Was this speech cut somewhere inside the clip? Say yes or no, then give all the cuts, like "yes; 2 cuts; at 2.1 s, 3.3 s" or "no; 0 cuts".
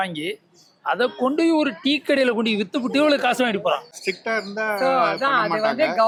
no; 0 cuts